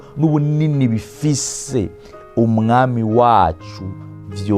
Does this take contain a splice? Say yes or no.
no